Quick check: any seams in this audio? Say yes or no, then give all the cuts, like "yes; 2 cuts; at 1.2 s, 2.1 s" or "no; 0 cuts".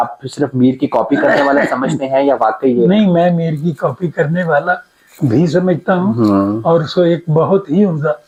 no; 0 cuts